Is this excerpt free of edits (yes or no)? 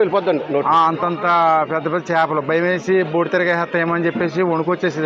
yes